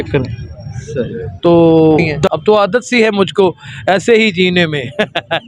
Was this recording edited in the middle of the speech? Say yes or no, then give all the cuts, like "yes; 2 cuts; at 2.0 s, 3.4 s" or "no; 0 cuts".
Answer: yes; 1 cut; at 2.2 s